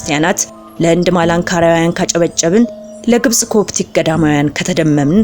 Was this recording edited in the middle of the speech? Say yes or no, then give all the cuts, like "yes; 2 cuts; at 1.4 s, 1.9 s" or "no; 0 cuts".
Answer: no; 0 cuts